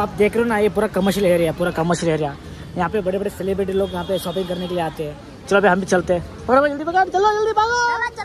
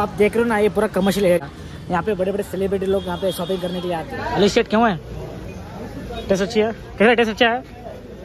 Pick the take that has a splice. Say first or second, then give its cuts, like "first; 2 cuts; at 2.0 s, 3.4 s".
second; 2 cuts; at 1.4 s, 4.1 s